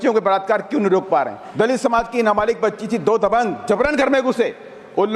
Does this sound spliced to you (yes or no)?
yes